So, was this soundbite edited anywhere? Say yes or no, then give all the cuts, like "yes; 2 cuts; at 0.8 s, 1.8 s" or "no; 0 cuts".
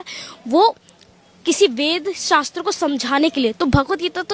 no; 0 cuts